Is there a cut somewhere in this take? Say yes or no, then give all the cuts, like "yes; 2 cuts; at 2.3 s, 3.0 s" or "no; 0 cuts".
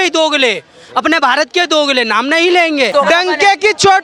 yes; 1 cut; at 2.9 s